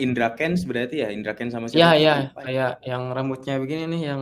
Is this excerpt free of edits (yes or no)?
yes